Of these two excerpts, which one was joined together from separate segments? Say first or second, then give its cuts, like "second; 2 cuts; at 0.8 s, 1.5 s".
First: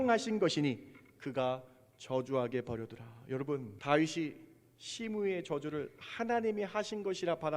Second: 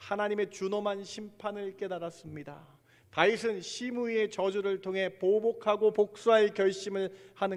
first; 1 cut; at 3.7 s